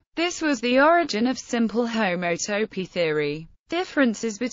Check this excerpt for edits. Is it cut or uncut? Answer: uncut